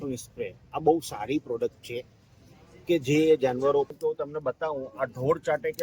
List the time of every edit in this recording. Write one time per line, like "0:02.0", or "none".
0:03.9